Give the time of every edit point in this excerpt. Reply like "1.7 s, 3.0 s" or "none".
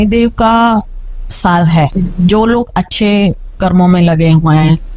1.9 s